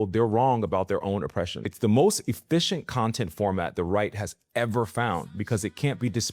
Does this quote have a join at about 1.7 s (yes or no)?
yes